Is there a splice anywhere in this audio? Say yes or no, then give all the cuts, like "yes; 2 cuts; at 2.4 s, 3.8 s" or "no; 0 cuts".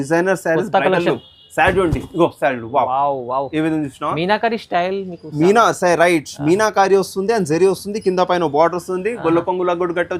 no; 0 cuts